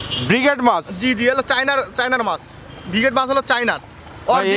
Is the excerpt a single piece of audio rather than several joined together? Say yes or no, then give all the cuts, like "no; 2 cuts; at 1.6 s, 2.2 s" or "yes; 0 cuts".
yes; 0 cuts